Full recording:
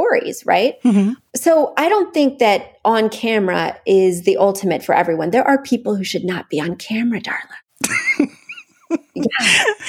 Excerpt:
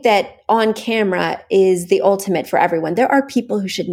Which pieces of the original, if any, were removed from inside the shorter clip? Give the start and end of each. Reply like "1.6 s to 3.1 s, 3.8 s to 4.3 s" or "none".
none